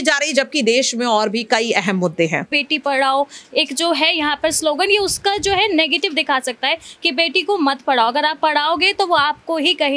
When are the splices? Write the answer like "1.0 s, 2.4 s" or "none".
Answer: 2.5 s